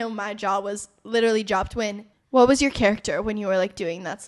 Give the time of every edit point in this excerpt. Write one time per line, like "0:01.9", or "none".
0:02.1